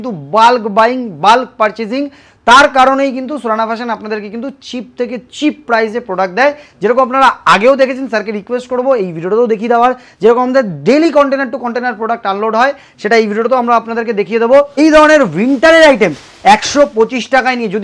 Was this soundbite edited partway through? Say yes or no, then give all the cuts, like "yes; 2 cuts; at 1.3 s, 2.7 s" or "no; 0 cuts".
yes; 1 cut; at 14.8 s